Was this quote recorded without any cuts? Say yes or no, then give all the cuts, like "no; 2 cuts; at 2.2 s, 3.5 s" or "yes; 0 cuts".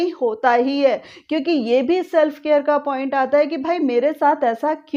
yes; 0 cuts